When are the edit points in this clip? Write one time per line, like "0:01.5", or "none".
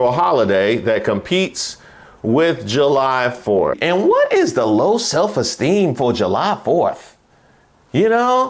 0:03.8